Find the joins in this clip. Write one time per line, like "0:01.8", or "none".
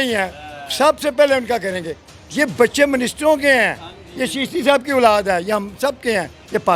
none